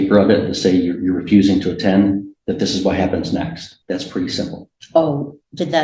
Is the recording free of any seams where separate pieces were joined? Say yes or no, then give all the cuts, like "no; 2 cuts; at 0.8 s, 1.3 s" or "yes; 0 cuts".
no; 1 cut; at 3.7 s